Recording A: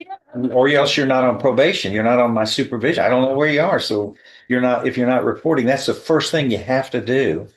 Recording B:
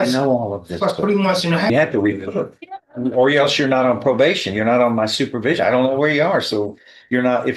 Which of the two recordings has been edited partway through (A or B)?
B